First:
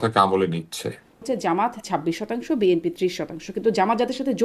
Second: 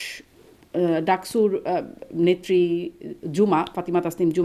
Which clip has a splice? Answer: first; 1 cut; at 1.2 s

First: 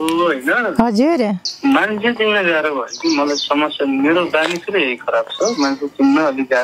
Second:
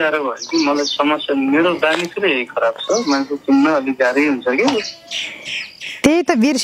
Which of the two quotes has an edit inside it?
first; 1 cut; at 1.5 s

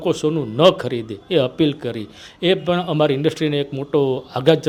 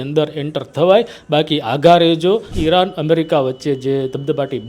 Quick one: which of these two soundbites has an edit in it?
second; 1 cut; at 2.5 s

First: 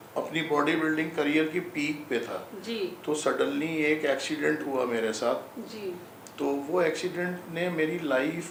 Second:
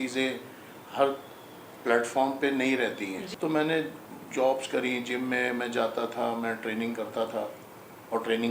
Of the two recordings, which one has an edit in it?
second; 1 cut; at 3.3 s

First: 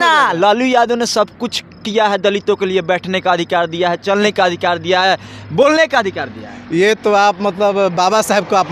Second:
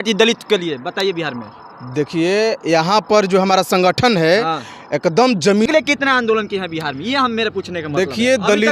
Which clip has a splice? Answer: second; 1 cut; at 5.7 s

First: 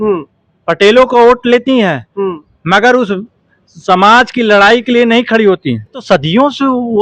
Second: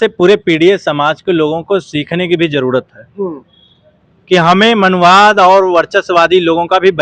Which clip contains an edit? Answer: first; 1 cut; at 6.0 s

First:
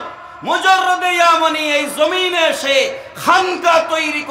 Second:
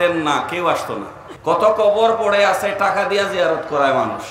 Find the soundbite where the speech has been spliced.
second; 1 cut; at 1.6 s

